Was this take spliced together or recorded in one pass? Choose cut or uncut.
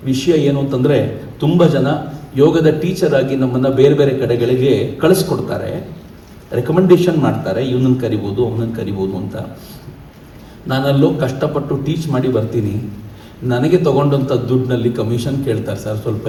uncut